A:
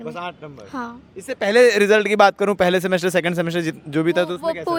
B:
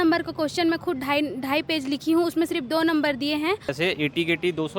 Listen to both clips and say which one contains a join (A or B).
B